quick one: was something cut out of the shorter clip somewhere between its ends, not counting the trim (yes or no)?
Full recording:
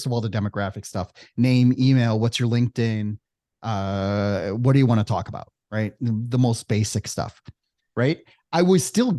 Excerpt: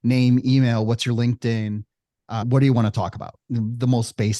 yes